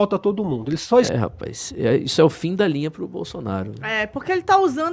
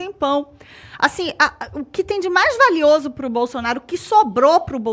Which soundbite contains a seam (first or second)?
first